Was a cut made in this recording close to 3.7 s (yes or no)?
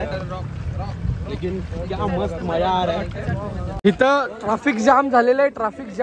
yes